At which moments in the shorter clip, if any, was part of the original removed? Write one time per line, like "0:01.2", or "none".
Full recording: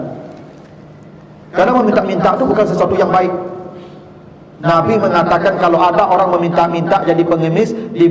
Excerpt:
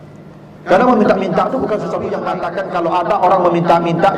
0:02.3